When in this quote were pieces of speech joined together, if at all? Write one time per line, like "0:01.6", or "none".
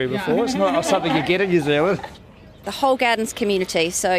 0:02.2